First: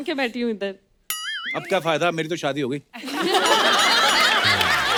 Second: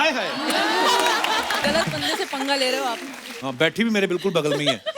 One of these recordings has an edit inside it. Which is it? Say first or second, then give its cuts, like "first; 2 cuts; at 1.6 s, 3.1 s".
second; 1 cut; at 1.6 s